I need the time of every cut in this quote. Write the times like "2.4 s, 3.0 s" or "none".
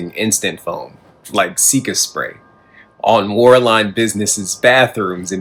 none